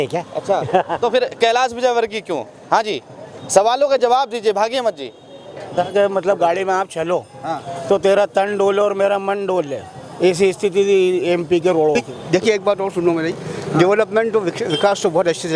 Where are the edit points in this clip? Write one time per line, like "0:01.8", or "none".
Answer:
0:05.8
0:12.1

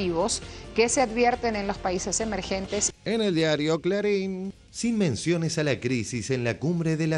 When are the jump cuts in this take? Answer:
0:02.8

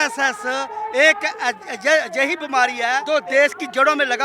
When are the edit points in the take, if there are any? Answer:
0:03.0

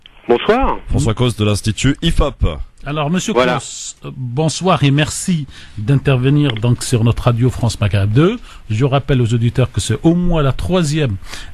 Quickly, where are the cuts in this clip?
0:10.0

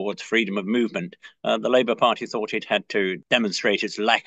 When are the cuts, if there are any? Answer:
0:03.2

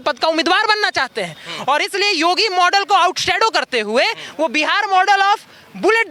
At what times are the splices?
none

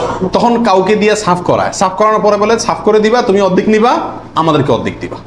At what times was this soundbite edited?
none

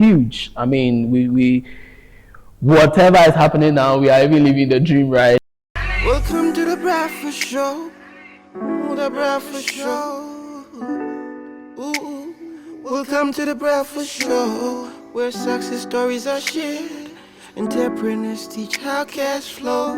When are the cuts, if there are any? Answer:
0:05.5

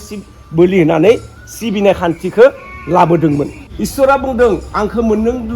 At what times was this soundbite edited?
0:03.7

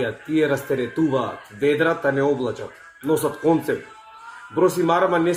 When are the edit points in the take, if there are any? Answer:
none

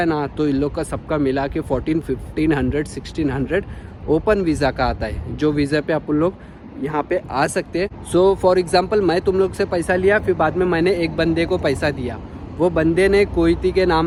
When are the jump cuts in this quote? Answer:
none

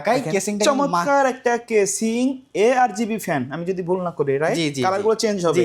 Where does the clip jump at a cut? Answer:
none

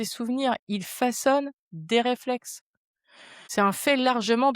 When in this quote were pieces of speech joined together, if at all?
0:03.4

